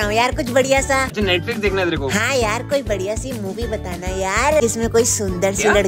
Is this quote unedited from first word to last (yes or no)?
no